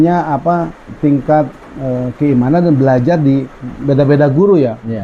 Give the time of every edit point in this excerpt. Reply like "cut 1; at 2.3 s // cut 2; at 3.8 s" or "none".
none